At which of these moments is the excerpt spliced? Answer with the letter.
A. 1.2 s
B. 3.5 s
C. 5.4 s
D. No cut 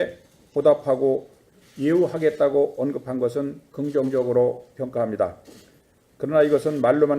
C